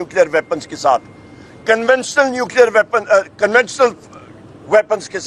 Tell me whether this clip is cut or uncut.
uncut